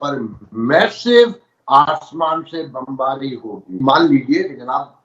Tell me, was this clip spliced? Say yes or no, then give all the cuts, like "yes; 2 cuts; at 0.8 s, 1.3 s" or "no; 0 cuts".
yes; 1 cut; at 3.7 s